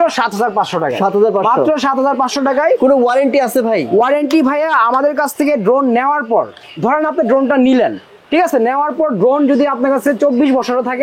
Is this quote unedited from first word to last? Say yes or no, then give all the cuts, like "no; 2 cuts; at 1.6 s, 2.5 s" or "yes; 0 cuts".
yes; 0 cuts